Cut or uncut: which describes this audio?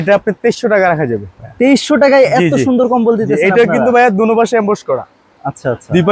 uncut